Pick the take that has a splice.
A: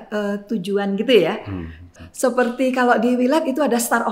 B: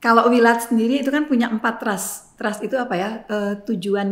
A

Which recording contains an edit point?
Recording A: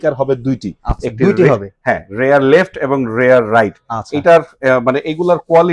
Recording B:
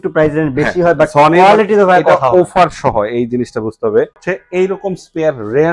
B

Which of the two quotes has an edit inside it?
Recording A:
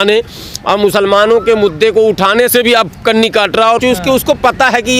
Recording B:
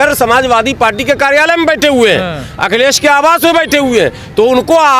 A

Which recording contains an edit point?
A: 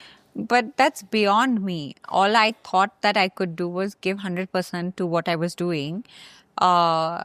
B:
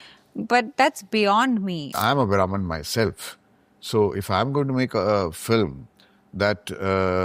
B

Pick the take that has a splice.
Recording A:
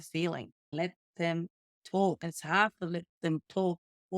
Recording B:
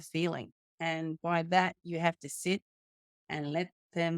A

